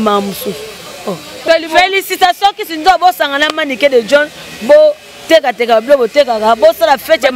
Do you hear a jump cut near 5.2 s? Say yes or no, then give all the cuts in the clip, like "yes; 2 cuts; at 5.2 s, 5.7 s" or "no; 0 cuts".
no; 1 cut; at 1.4 s